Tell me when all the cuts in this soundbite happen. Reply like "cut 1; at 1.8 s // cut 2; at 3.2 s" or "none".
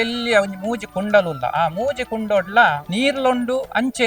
cut 1; at 2.8 s